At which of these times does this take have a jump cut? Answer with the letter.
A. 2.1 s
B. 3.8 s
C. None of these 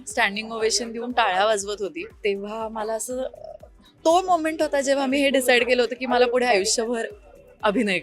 A